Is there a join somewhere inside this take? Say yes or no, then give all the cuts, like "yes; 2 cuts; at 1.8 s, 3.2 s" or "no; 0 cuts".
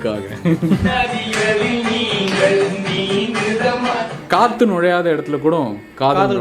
yes; 2 cuts; at 0.9 s, 4.1 s